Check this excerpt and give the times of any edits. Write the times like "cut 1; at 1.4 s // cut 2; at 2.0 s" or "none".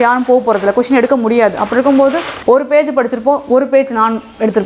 cut 1; at 2.3 s